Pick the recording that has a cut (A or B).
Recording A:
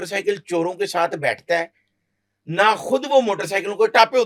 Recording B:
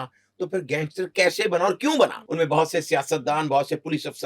B